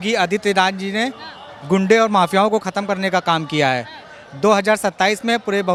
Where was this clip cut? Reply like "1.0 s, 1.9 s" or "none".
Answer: none